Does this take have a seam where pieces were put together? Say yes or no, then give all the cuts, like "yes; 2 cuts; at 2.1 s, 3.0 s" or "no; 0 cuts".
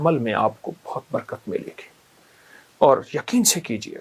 no; 0 cuts